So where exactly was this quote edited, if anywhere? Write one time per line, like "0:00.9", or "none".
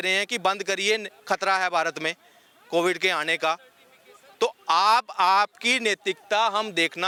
none